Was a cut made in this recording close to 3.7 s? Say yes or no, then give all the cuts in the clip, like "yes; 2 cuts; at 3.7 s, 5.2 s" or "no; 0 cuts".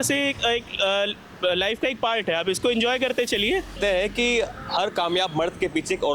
yes; 1 cut; at 3.7 s